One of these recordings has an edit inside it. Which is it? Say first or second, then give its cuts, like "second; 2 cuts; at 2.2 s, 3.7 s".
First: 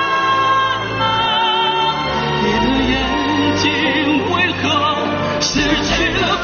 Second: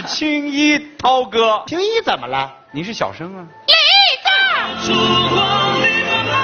second; 2 cuts; at 1.7 s, 4.7 s